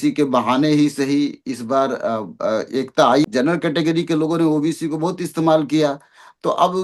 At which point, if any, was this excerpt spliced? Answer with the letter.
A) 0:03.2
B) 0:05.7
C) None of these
A